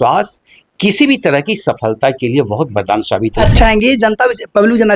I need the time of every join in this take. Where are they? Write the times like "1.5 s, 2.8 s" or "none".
3.5 s